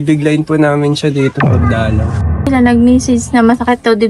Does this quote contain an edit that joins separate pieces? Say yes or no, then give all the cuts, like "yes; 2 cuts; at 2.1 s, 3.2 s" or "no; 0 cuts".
yes; 1 cut; at 2.3 s